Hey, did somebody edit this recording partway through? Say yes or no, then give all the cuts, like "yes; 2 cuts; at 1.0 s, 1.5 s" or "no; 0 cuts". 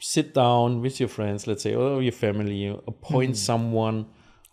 no; 0 cuts